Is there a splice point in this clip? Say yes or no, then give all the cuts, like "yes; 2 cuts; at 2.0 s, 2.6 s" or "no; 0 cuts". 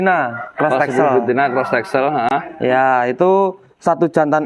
no; 0 cuts